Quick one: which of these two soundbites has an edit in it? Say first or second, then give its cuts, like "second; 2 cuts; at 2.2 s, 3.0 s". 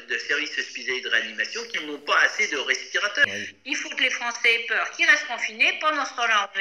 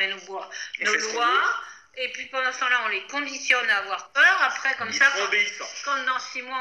first; 1 cut; at 3.2 s